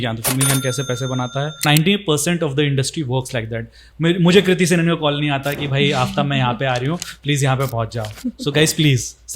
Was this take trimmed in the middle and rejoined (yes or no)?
yes